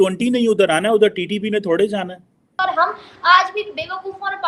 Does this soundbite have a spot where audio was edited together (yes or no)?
yes